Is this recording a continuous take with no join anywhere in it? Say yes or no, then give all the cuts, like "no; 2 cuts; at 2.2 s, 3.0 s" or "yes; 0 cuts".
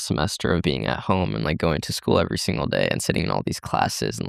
yes; 0 cuts